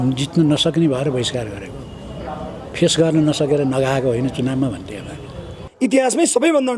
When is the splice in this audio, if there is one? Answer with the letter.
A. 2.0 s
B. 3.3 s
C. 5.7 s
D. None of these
C